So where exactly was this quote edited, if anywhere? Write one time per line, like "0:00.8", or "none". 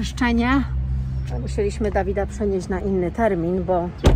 none